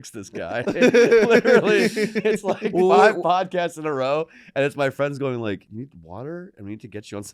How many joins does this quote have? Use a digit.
1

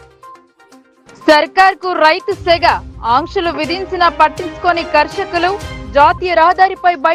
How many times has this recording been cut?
0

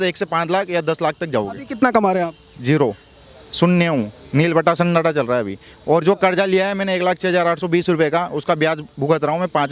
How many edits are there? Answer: 0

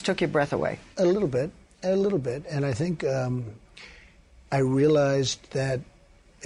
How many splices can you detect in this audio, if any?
1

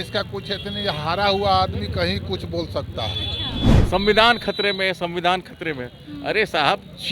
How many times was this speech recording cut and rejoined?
1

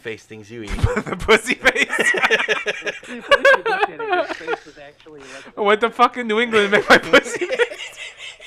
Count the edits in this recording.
1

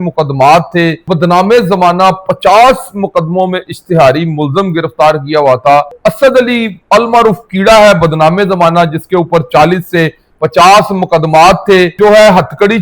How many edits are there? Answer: 3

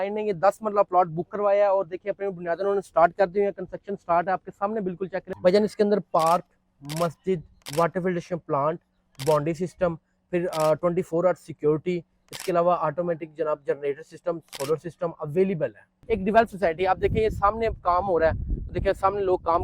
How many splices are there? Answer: 2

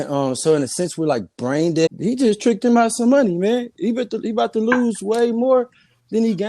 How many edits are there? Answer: 1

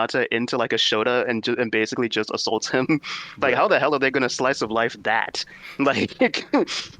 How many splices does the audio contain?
0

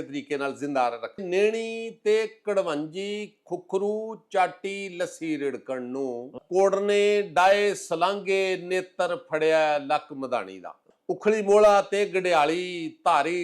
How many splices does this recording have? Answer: 3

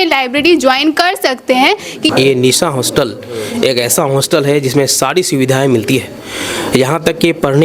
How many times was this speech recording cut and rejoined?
1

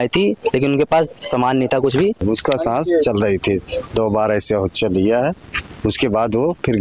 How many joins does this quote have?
1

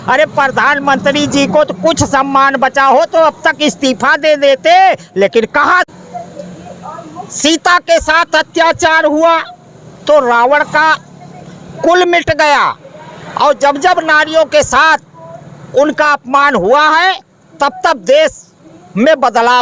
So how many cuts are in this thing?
1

